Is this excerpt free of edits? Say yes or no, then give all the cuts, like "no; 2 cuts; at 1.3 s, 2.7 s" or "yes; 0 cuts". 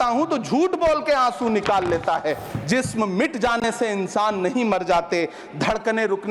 no; 1 cut; at 2.5 s